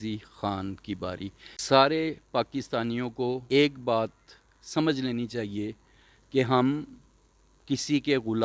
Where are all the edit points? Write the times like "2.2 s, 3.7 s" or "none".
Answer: 1.5 s, 3.4 s